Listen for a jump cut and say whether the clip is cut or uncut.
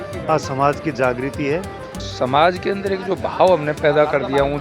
cut